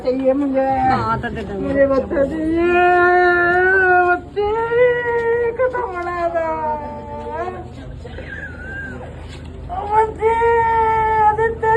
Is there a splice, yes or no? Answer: no